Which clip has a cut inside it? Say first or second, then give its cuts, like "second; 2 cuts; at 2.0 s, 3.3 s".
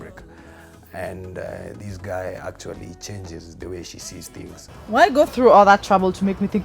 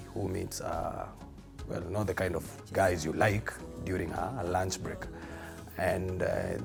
first; 1 cut; at 4.7 s